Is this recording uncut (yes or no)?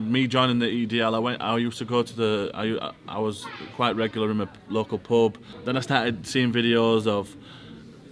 no